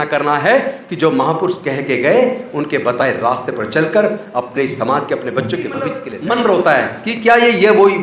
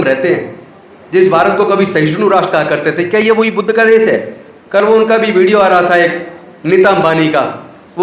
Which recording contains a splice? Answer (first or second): first